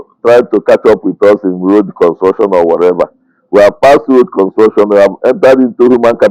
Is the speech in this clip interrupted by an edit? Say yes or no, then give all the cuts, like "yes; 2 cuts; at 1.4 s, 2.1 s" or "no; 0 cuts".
no; 0 cuts